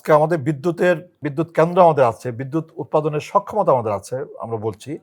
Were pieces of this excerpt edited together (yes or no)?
yes